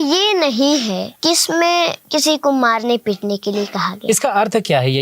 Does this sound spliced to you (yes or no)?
yes